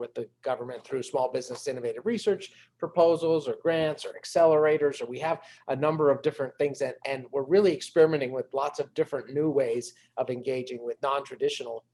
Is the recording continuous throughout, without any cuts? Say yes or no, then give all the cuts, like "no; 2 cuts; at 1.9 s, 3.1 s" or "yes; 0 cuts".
yes; 0 cuts